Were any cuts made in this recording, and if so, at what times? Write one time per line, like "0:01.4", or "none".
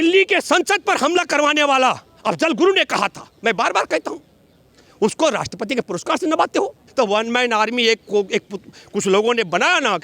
0:06.8